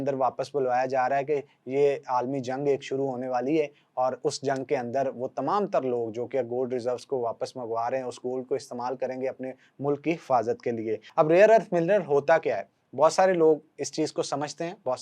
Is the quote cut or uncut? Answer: cut